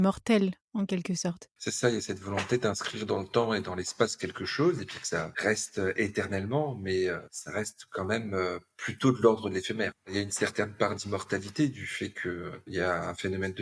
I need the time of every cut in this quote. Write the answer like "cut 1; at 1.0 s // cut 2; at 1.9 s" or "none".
cut 1; at 1.6 s // cut 2; at 5.3 s // cut 3; at 7.3 s // cut 4; at 10.0 s // cut 5; at 12.6 s